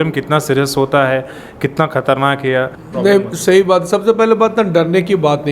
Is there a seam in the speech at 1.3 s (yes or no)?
no